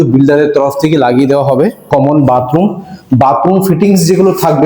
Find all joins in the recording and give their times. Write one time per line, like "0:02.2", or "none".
0:01.8